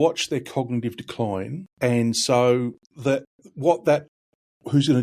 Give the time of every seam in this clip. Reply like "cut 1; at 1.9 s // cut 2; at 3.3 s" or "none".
cut 1; at 1.6 s // cut 2; at 2.8 s